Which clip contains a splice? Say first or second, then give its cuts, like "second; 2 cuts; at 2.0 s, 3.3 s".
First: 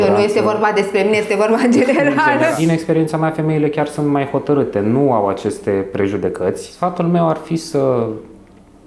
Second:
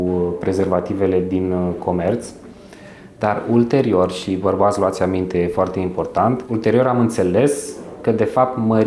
first; 2 cuts; at 2.5 s, 6.7 s